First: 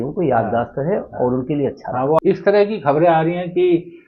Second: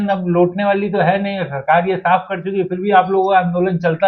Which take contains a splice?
first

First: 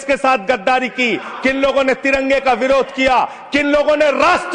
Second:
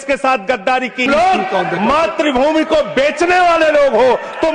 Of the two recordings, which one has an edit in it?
second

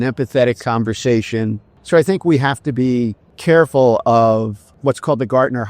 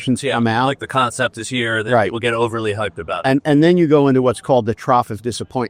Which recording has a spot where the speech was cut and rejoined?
first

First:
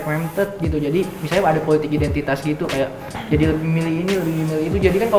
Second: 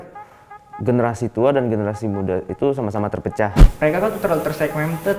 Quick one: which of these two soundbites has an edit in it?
second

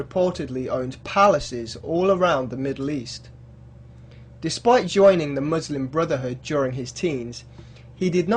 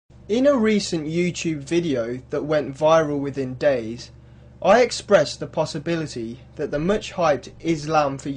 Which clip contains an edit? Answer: first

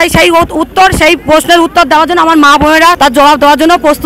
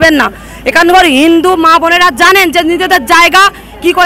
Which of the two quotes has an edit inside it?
first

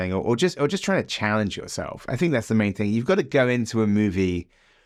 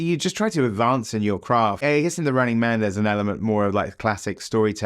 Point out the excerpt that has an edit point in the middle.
second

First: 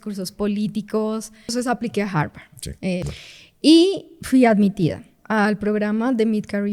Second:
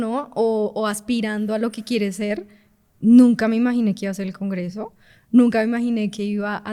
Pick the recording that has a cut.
first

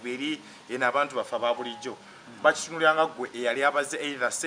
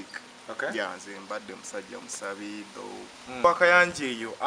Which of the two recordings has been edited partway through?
second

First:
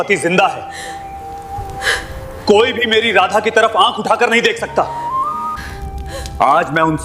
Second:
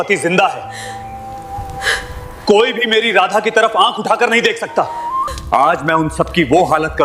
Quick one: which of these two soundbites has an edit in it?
second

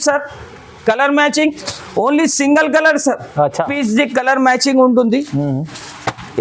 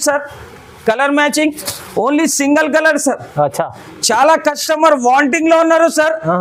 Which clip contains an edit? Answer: first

